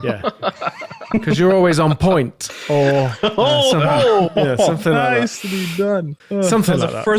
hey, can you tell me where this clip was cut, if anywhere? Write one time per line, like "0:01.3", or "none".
0:06.2